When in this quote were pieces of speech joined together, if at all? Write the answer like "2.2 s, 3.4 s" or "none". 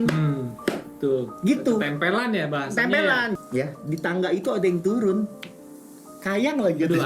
3.4 s